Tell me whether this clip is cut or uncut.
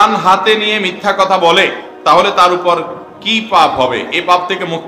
uncut